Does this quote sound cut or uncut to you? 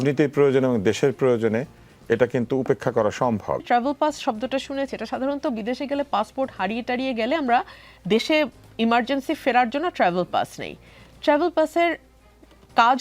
cut